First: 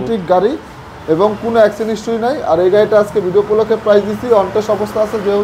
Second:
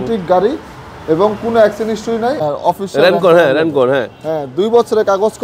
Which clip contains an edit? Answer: second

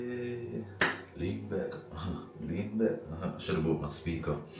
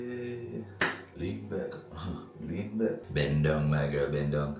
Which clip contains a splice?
second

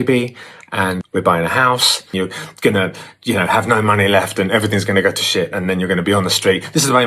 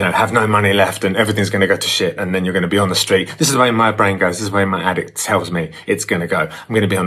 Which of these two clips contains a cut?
first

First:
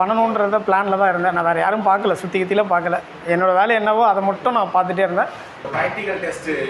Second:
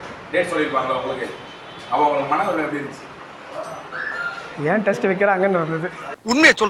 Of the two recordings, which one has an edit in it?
first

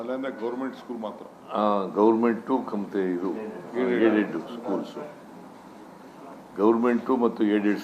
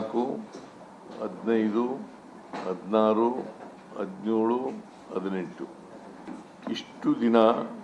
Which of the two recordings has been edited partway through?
second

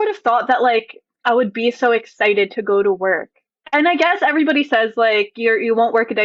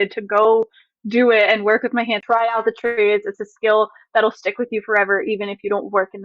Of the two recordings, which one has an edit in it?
second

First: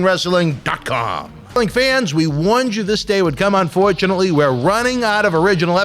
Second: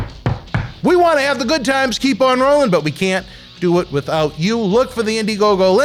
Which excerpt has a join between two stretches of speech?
first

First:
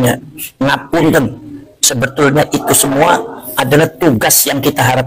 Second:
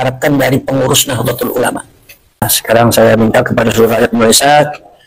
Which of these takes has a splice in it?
second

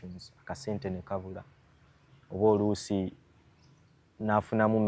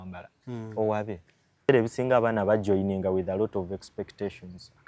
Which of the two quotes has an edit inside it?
second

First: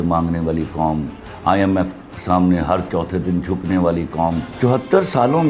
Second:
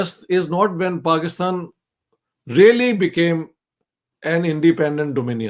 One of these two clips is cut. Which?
first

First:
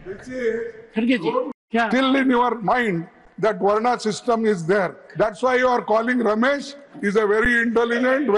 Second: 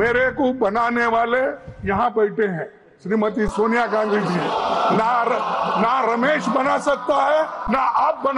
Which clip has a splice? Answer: first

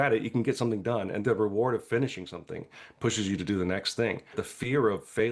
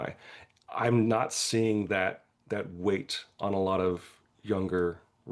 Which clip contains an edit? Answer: first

